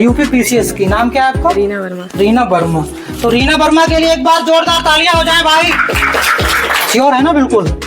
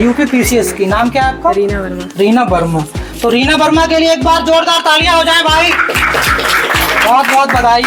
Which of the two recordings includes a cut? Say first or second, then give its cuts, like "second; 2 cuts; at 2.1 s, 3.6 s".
first; 1 cut; at 6.8 s